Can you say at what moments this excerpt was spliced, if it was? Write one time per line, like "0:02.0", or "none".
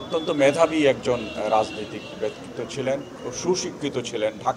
0:03.2